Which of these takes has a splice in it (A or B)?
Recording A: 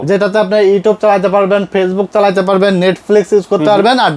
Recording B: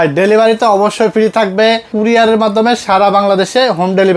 B